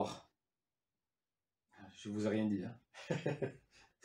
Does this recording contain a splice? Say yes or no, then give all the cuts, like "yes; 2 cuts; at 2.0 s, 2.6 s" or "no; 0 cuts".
no; 0 cuts